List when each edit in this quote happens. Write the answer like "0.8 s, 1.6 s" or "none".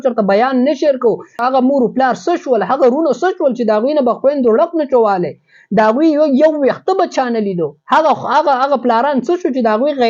1.4 s